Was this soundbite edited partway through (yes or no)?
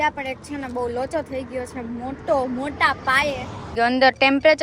yes